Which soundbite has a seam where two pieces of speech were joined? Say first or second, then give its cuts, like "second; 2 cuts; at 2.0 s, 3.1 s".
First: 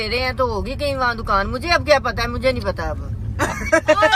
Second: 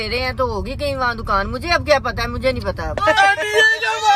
second; 1 cut; at 3.0 s